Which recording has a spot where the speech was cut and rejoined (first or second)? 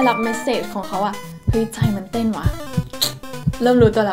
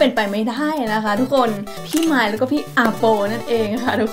second